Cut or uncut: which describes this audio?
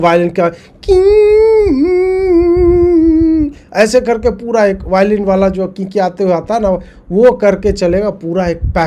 uncut